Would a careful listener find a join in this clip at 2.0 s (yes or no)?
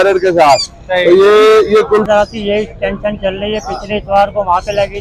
yes